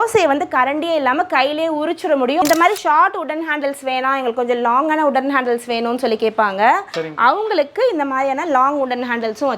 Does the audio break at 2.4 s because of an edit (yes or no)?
yes